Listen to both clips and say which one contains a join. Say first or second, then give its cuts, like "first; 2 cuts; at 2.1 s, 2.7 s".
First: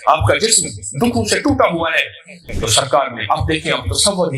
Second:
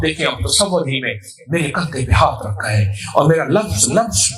first; 1 cut; at 2.4 s